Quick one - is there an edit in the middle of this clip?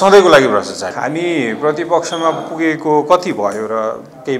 yes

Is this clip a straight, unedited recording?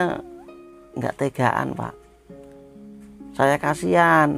yes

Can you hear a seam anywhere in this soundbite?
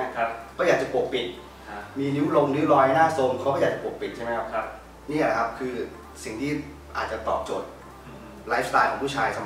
no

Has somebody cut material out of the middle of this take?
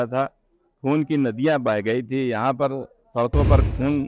no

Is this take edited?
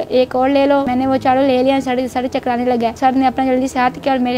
yes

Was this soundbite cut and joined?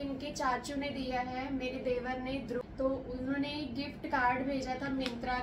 yes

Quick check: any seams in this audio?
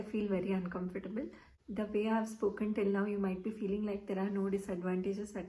yes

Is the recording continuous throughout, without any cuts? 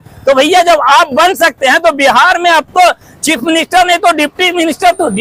yes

